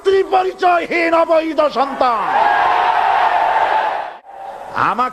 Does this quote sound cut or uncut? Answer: cut